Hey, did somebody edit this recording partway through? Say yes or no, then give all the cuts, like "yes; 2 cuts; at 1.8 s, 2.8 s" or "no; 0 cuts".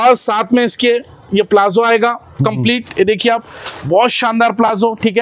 no; 0 cuts